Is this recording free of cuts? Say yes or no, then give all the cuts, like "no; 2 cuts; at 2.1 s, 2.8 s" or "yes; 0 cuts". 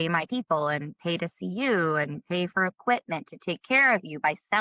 yes; 0 cuts